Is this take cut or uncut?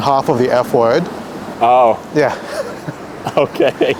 uncut